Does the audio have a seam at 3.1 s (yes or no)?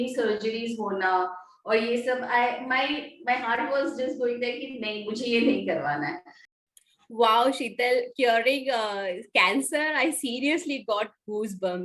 no